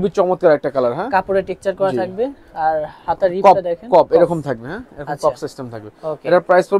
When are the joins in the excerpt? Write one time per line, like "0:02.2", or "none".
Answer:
none